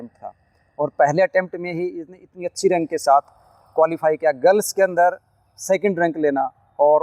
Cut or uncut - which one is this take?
uncut